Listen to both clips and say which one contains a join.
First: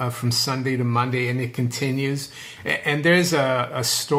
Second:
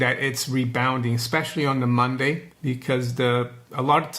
second; 1 cut; at 2.5 s

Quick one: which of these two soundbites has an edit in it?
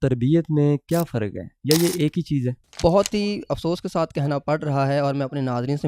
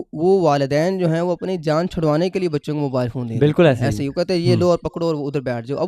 first; 1 cut; at 2.7 s

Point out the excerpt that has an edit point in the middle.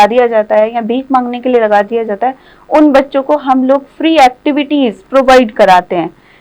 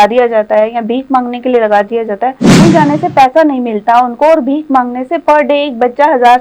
second; 1 cut; at 2.5 s

